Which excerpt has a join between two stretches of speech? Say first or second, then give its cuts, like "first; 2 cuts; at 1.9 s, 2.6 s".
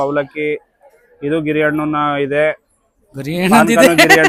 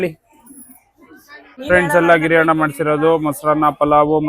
second; 1 cut; at 1.5 s